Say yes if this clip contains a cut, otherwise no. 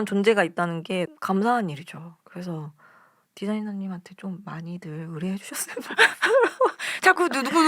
no